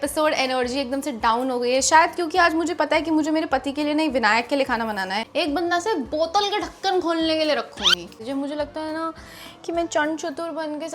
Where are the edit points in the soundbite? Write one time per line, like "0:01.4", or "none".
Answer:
0:05.3
0:08.2